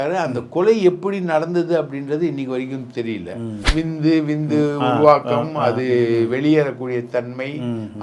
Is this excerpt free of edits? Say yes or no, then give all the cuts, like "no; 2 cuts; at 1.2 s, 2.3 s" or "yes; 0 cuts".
no; 1 cut; at 3.5 s